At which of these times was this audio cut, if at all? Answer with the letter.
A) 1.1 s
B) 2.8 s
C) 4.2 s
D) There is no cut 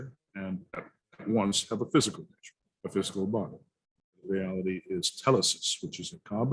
C